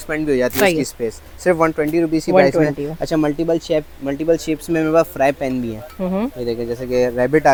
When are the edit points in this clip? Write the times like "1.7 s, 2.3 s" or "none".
none